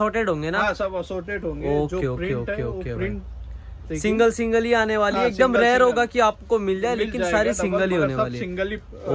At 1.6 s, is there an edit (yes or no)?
no